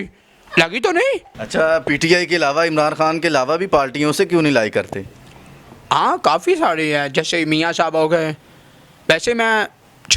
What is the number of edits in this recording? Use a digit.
1